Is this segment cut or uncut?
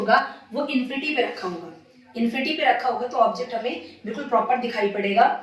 uncut